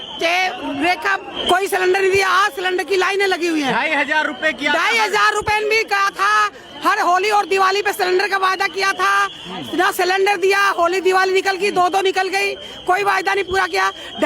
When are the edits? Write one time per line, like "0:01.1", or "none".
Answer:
0:01.3